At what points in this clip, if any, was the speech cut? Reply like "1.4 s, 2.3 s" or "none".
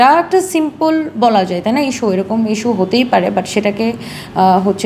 none